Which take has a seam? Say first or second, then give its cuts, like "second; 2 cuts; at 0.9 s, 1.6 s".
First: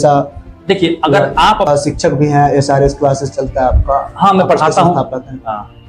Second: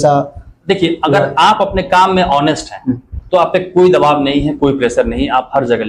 first; 1 cut; at 1.7 s